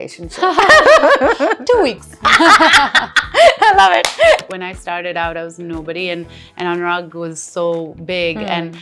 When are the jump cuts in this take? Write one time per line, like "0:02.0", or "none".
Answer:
0:04.4